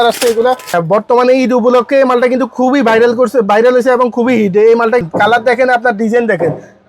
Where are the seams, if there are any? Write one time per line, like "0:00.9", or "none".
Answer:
0:00.8
0:05.0